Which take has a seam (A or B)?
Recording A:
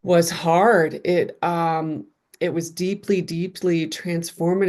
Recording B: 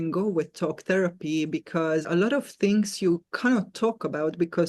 B